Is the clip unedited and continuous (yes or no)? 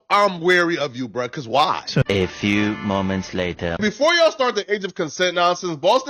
yes